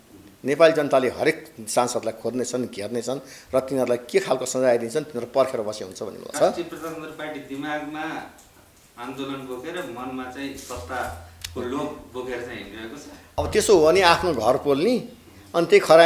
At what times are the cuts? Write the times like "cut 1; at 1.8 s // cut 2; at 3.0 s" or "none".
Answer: cut 1; at 6.3 s // cut 2; at 13.2 s